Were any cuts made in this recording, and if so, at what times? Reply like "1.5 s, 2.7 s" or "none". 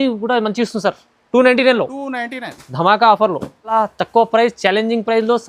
3.7 s